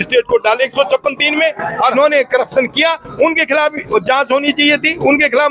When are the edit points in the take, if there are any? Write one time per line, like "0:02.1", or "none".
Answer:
0:01.9